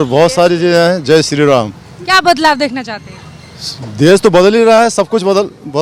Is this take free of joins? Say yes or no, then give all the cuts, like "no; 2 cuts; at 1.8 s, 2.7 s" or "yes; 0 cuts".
yes; 0 cuts